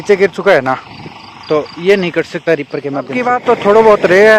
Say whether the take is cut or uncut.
cut